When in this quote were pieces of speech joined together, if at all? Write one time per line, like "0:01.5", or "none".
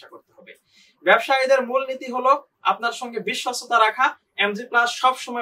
none